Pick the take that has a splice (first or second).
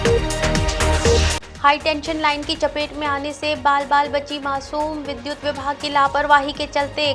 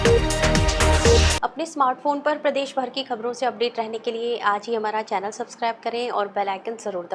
first